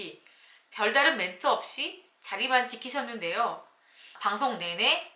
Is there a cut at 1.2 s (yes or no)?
no